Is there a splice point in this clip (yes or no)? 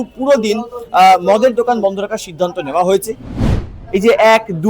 yes